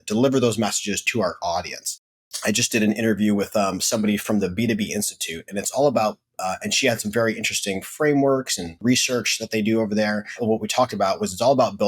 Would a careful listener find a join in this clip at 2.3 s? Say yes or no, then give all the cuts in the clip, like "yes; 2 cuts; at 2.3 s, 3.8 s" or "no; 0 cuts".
yes; 4 cuts; at 1.0 s, 2.3 s, 8.8 s, 10.4 s